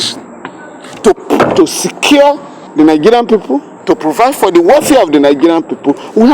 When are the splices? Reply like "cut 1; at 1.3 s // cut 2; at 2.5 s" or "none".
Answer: cut 1; at 2.5 s // cut 2; at 3.7 s